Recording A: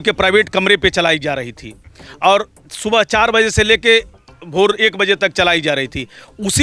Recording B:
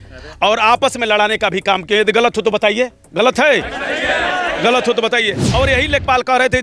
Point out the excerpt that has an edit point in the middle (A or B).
B